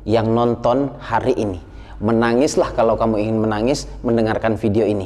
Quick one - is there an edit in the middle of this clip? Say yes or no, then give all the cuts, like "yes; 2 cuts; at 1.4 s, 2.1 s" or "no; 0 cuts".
no; 0 cuts